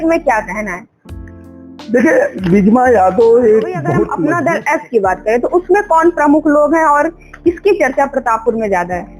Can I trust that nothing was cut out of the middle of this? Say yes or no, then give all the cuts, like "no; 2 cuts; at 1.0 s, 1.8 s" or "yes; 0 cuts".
no; 1 cut; at 4.1 s